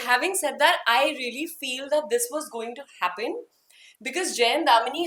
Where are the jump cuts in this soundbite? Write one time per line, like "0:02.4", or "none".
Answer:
none